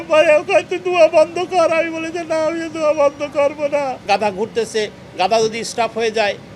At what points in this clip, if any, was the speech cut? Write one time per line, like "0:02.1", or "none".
0:04.0